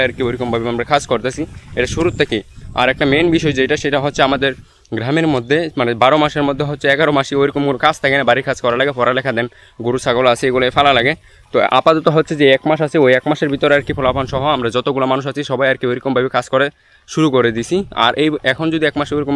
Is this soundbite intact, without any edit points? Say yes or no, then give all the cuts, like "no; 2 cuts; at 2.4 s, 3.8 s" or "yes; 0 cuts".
yes; 0 cuts